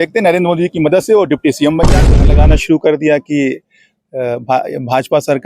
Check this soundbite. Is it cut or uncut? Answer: cut